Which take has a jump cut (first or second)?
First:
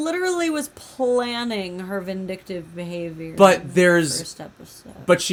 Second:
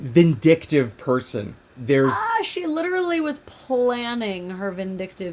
second